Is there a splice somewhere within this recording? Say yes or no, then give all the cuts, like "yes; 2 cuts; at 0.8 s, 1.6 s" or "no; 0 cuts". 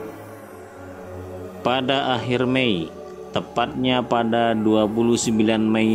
yes; 1 cut; at 1.6 s